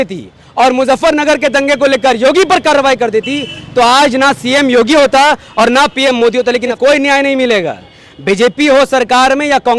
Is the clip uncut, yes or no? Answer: no